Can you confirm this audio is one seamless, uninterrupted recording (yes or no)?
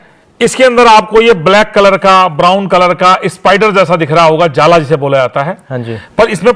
yes